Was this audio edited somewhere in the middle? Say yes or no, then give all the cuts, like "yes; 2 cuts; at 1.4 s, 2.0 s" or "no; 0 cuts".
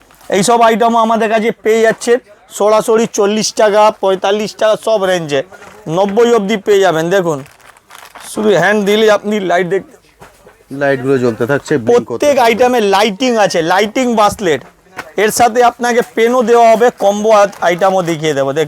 no; 0 cuts